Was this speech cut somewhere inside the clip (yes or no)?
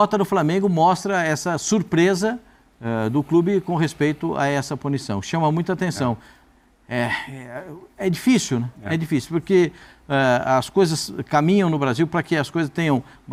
no